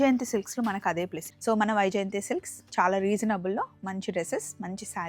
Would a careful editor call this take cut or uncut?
cut